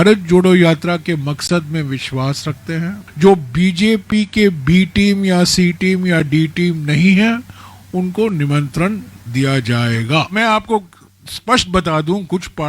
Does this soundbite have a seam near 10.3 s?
yes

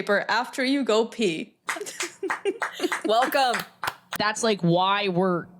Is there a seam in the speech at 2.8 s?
no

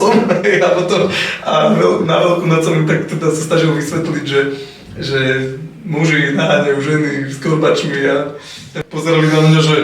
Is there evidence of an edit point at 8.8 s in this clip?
yes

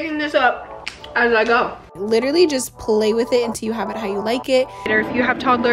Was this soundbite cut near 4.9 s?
yes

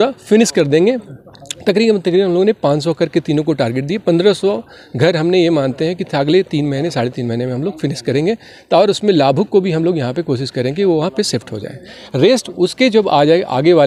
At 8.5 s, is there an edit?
no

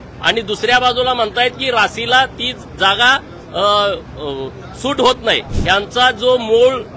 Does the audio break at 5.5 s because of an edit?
yes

